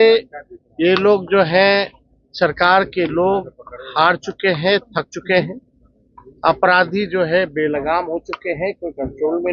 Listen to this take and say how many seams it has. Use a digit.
0